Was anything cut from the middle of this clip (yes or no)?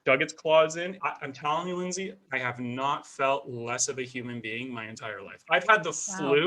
yes